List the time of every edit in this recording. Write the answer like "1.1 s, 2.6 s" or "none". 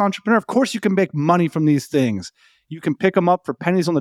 none